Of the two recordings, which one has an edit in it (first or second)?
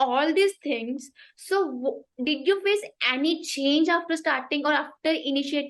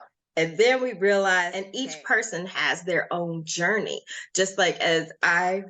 second